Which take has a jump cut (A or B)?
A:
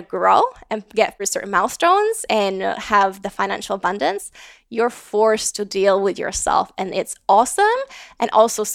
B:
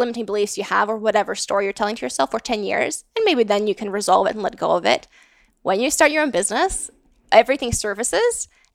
A